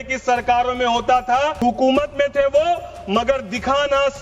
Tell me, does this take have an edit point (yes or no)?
yes